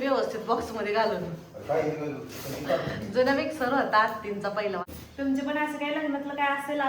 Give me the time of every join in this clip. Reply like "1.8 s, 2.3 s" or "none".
4.8 s

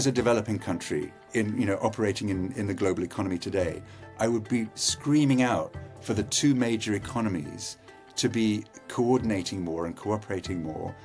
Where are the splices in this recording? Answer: none

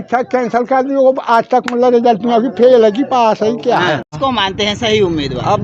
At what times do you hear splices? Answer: 4.1 s

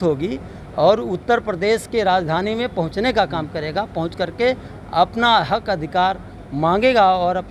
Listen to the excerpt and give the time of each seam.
none

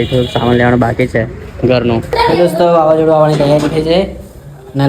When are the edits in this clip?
2.1 s

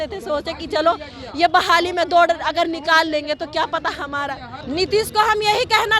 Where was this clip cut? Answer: 4.6 s

